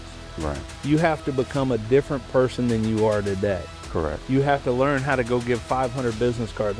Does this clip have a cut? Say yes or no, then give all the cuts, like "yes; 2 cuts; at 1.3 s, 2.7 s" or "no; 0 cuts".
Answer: no; 0 cuts